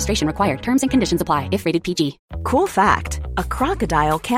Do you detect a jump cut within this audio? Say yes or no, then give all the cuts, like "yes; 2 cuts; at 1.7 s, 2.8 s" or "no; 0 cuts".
yes; 1 cut; at 2.3 s